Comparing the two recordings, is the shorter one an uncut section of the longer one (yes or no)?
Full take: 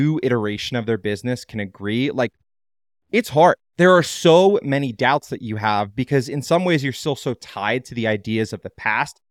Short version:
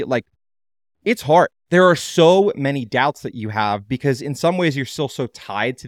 yes